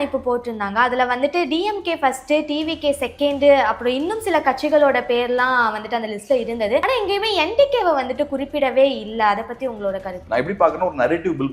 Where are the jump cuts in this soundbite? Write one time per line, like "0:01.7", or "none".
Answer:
0:06.8
0:10.2